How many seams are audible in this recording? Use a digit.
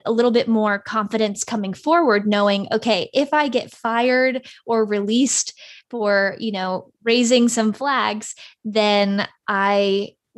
0